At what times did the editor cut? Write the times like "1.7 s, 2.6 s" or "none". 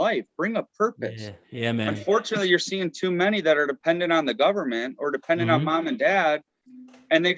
none